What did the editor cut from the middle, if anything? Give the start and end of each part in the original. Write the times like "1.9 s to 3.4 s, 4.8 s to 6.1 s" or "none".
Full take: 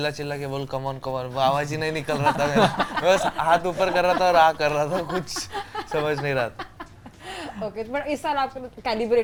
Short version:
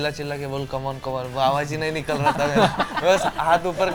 none